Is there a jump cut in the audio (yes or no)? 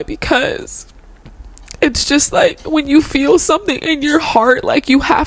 no